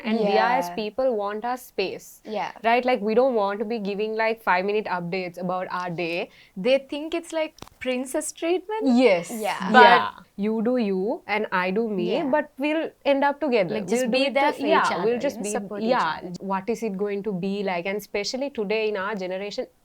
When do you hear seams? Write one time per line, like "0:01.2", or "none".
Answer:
0:06.4
0:10.2
0:16.3